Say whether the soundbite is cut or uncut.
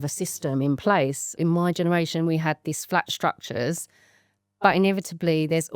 cut